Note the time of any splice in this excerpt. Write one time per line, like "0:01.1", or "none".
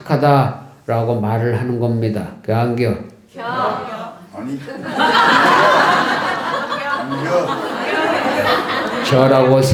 none